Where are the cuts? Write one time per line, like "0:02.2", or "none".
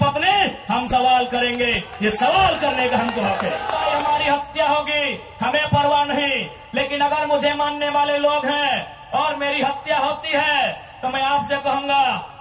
0:03.8